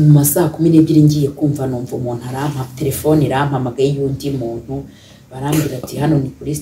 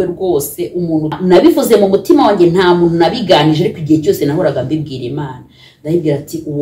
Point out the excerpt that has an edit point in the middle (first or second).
second